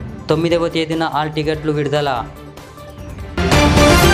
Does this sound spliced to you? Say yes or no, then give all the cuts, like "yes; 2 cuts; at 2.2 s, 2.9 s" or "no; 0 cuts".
no; 0 cuts